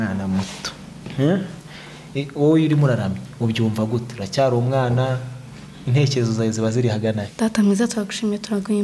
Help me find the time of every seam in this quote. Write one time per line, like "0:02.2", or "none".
0:07.3